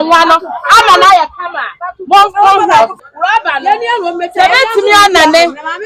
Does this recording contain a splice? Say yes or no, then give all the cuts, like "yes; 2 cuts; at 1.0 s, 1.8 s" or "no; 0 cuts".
yes; 1 cut; at 2.9 s